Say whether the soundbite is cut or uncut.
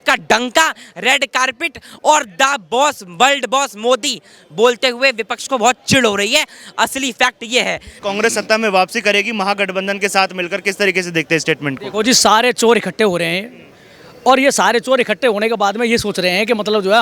cut